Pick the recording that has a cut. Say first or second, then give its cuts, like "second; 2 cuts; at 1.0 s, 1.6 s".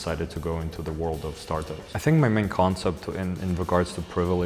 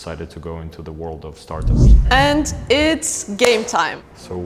first; 1 cut; at 1.6 s